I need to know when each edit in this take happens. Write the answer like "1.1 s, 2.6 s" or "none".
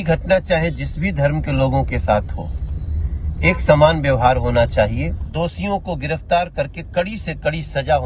5.2 s